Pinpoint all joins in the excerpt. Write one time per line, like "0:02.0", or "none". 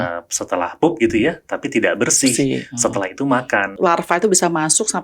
0:03.8